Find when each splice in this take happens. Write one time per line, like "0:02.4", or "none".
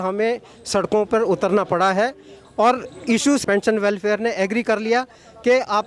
0:03.4